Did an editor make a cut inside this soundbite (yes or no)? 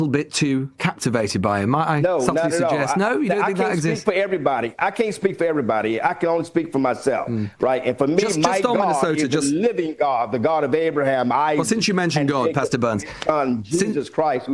no